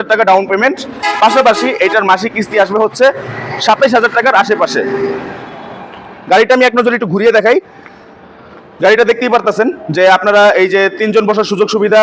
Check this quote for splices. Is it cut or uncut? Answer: uncut